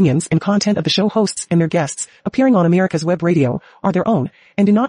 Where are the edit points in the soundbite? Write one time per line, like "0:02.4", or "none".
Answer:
none